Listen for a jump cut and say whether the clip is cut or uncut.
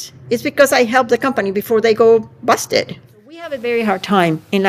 cut